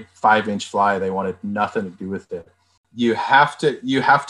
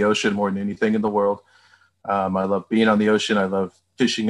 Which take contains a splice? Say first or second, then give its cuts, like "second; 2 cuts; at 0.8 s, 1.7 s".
first; 1 cut; at 3.0 s